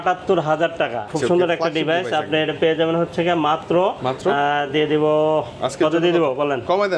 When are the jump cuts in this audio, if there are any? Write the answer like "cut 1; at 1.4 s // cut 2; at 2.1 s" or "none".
cut 1; at 1.1 s